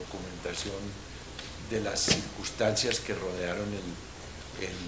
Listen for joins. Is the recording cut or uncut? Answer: cut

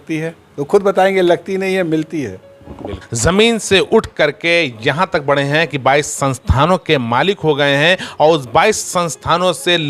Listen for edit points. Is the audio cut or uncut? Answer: cut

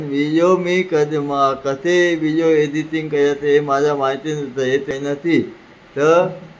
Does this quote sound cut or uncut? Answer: cut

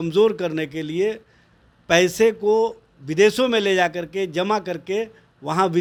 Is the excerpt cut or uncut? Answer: uncut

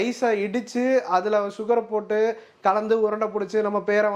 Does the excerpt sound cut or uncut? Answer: uncut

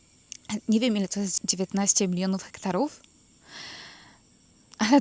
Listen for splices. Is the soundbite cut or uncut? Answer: cut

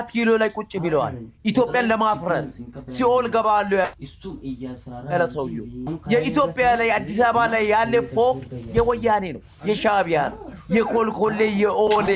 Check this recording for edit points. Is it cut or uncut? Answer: cut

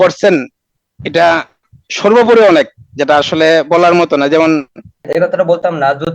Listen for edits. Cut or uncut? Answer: cut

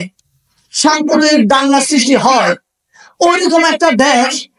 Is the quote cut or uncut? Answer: uncut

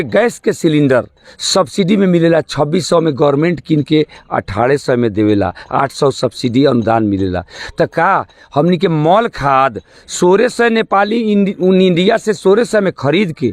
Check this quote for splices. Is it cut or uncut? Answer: uncut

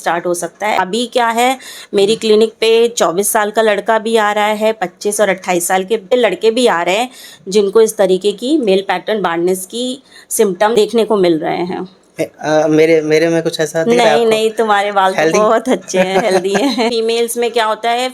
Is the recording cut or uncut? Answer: cut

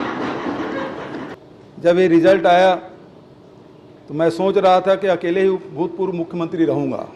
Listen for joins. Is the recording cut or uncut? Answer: cut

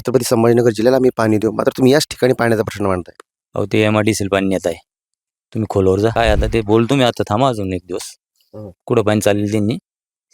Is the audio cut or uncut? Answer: cut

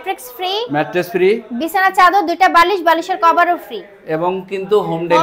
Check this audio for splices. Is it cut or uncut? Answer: uncut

